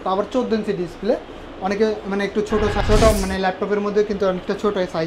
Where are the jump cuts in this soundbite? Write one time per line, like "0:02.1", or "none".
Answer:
0:02.8